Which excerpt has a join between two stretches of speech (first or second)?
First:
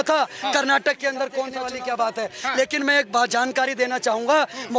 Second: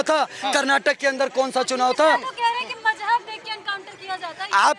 first